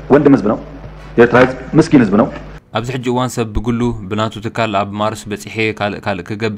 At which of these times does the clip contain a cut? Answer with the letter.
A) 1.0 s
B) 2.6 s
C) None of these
B